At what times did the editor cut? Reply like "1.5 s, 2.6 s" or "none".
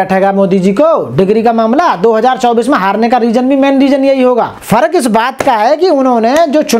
4.6 s